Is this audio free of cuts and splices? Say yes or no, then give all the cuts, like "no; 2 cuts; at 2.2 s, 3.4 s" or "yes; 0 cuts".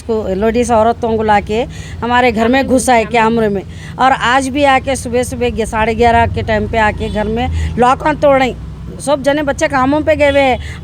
yes; 0 cuts